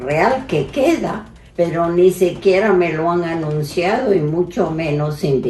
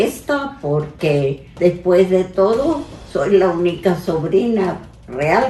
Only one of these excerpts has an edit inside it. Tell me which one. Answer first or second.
first